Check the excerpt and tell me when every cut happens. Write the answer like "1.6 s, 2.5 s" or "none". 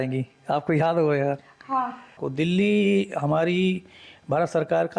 2.2 s